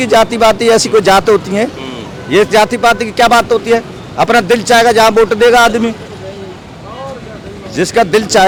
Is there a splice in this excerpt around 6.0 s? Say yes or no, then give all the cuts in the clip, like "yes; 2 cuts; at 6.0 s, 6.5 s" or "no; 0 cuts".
no; 0 cuts